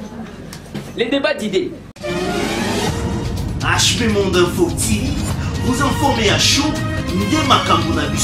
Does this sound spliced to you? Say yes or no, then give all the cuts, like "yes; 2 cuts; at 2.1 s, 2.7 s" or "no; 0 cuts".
yes; 1 cut; at 2.0 s